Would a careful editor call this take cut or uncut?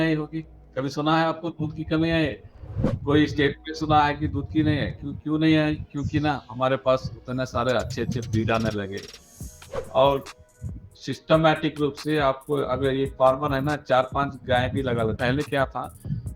cut